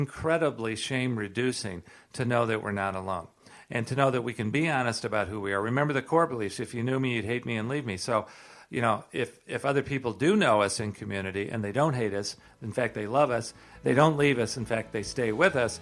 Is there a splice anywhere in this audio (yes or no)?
no